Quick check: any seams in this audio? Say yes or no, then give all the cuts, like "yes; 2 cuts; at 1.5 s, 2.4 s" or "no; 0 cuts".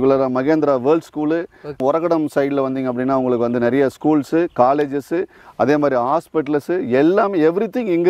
no; 0 cuts